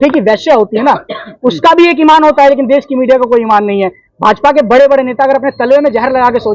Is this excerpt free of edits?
yes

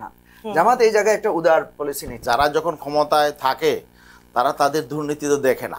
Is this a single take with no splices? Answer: no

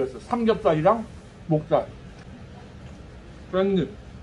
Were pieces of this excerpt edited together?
yes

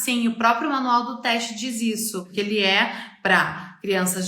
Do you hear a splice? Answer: yes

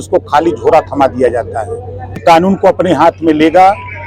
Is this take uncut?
no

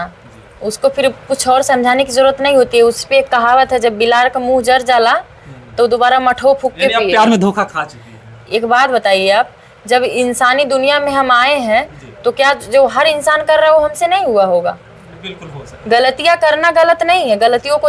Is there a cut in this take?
no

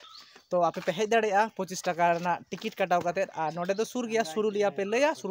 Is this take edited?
no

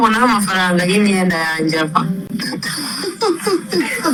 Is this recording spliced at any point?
no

